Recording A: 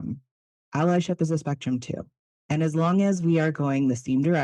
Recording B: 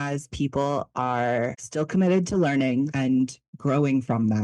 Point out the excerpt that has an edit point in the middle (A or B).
B